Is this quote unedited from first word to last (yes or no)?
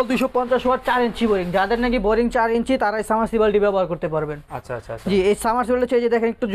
yes